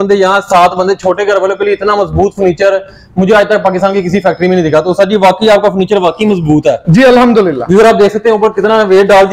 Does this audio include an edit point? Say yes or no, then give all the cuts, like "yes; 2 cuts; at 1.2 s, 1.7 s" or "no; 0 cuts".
no; 0 cuts